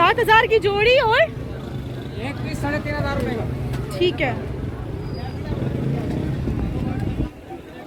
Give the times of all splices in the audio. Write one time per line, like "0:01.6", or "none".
none